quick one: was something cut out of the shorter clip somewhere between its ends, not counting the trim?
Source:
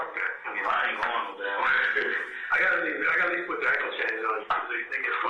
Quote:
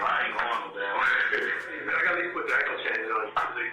yes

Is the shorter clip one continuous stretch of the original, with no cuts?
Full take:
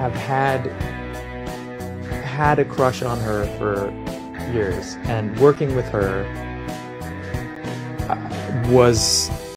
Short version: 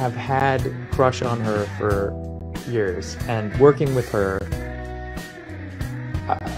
no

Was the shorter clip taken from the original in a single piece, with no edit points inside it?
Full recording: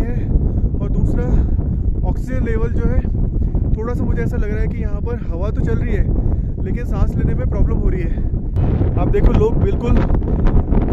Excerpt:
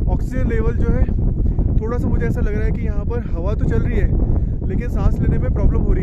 yes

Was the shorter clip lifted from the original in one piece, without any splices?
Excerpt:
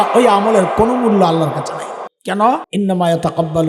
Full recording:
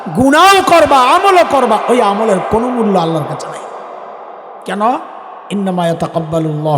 no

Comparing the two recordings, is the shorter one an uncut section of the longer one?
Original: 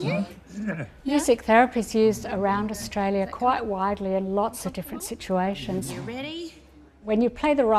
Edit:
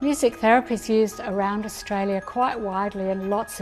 yes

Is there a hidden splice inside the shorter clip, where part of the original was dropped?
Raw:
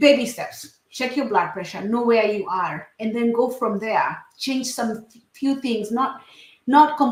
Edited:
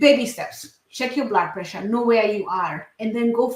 no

